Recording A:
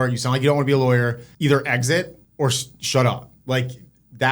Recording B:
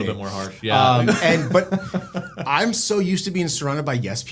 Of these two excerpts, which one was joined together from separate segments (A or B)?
A